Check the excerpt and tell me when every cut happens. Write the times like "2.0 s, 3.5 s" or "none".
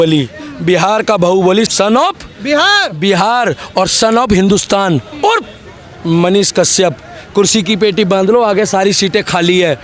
1.7 s